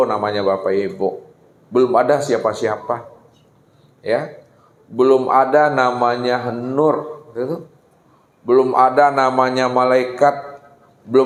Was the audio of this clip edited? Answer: no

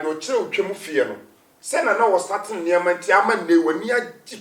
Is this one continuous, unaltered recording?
yes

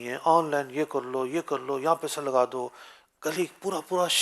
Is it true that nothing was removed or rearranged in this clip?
yes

